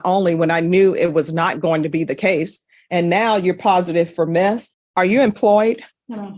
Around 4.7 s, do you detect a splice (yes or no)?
yes